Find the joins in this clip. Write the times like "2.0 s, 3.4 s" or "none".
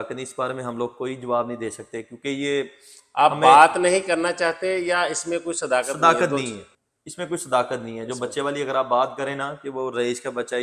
none